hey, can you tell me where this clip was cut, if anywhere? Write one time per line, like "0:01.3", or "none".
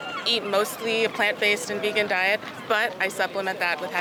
none